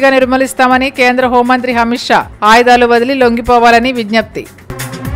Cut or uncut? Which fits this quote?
uncut